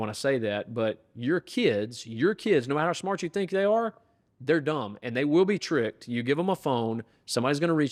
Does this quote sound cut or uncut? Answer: uncut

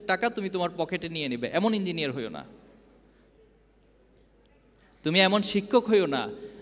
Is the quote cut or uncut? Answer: uncut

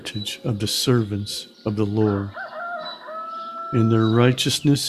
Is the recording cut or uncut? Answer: cut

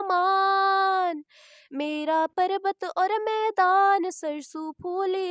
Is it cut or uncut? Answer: uncut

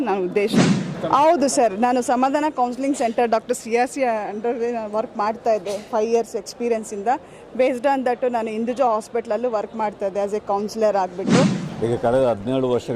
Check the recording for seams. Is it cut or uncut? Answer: cut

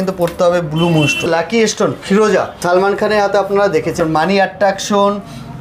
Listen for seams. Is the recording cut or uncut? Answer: cut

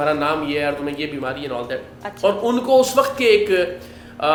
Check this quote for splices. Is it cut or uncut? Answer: uncut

